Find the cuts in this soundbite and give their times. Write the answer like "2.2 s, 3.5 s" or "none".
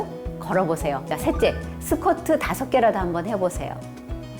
1.1 s